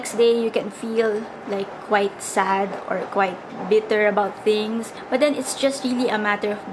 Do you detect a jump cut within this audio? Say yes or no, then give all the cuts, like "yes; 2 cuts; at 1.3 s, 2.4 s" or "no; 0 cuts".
yes; 1 cut; at 4.9 s